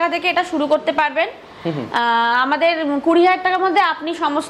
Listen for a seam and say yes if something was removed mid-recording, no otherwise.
no